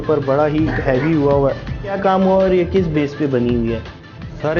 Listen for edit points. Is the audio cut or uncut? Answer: cut